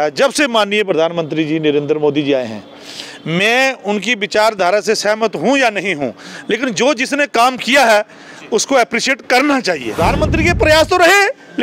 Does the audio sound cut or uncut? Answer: cut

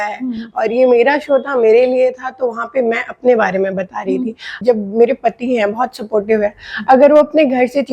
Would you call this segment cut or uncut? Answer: cut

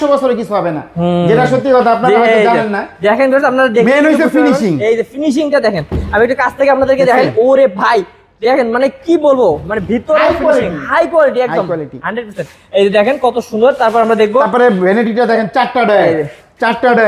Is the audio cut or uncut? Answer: uncut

